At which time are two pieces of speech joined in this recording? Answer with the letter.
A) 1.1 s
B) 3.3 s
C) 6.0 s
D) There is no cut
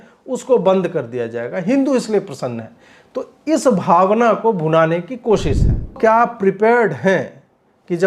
C